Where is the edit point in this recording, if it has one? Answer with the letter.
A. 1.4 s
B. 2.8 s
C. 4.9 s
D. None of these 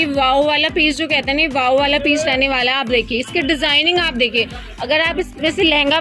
D